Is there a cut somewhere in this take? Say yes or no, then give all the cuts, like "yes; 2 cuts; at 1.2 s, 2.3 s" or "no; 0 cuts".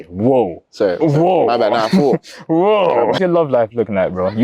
yes; 1 cut; at 3.2 s